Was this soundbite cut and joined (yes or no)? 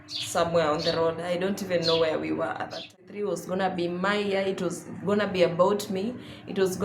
yes